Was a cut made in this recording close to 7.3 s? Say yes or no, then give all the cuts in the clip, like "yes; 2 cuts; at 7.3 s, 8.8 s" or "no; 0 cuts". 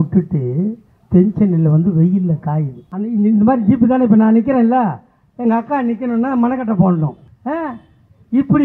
yes; 2 cuts; at 2.8 s, 7.3 s